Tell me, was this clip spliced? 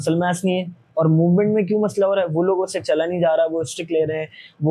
no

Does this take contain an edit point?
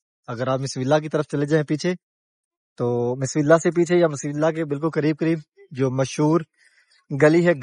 no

